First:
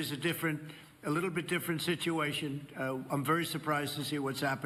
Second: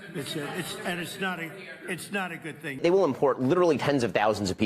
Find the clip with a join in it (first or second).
second